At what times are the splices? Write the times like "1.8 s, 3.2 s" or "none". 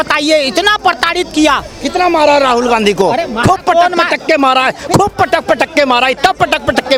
none